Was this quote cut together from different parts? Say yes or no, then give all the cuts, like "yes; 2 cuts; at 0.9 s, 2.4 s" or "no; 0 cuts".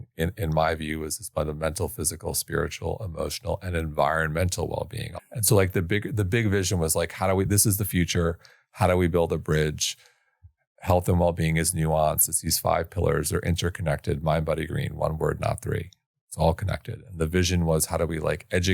yes; 1 cut; at 5.0 s